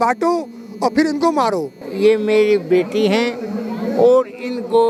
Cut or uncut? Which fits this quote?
cut